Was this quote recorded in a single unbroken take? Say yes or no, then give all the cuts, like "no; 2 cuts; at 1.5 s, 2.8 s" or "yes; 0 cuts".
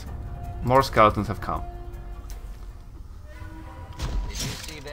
yes; 0 cuts